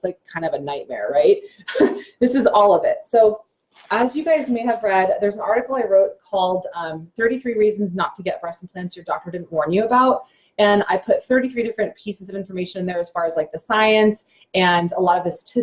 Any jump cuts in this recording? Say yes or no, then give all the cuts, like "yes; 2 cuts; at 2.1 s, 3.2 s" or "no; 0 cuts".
no; 0 cuts